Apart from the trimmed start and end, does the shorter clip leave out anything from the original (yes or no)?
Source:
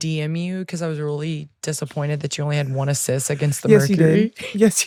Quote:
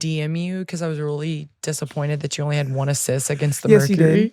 no